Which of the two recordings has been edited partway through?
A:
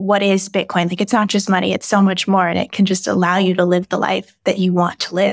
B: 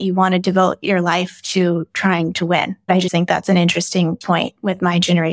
B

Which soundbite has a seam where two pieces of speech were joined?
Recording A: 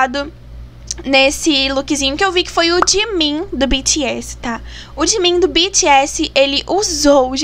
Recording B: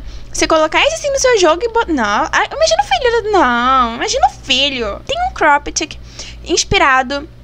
B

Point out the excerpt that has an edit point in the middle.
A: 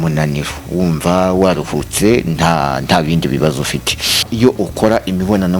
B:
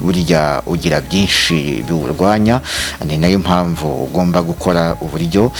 A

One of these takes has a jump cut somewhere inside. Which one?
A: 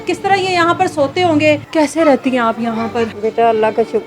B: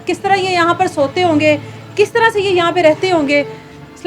A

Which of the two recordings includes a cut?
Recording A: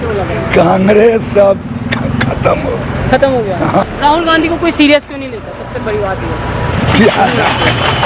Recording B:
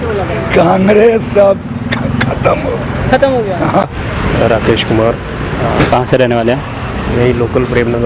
B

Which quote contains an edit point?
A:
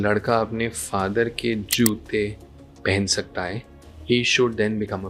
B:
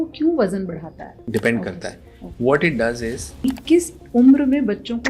B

